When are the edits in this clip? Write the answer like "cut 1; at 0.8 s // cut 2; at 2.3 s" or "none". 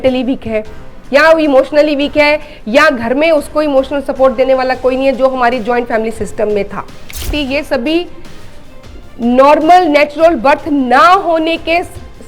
cut 1; at 7.3 s